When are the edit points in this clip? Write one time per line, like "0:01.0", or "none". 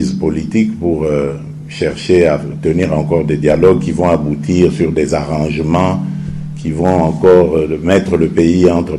none